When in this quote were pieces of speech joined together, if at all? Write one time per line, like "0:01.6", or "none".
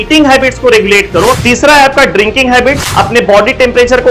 0:01.4
0:02.9

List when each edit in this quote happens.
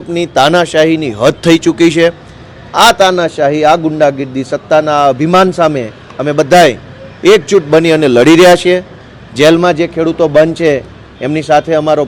none

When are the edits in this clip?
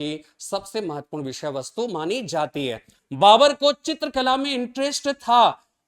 0:02.9

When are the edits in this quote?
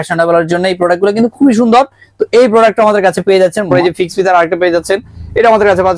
0:03.7

